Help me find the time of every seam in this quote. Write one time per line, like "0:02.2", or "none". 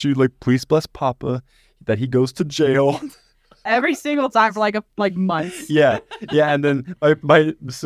none